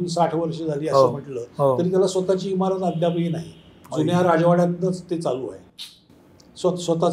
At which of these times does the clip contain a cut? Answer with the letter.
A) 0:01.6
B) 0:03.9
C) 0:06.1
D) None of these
D